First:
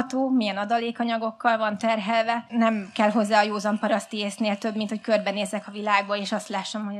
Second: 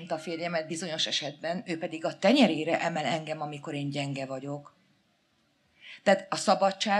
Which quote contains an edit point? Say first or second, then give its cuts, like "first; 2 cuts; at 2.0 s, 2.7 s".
first; 1 cut; at 2.4 s